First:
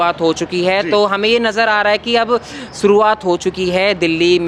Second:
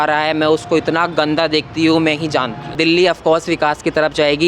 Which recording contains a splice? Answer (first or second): second